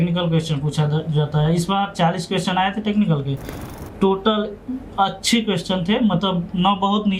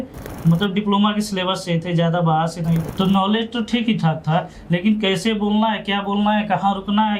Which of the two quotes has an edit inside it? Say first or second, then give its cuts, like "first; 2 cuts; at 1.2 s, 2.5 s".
second; 1 cut; at 2.8 s